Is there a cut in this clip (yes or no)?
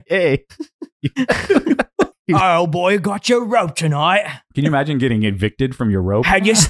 yes